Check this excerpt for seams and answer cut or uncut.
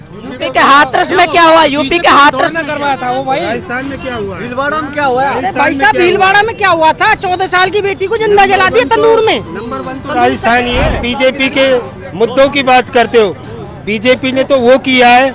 cut